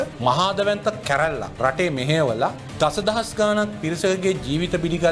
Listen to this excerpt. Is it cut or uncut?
uncut